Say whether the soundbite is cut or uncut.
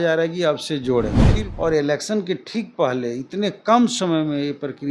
cut